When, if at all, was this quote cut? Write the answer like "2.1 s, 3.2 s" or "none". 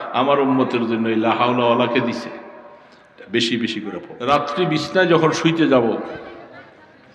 4.1 s